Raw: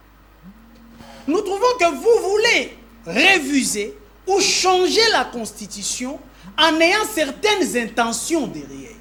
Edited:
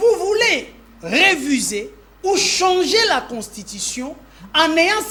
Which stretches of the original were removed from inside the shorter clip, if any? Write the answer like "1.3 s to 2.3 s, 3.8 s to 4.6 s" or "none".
none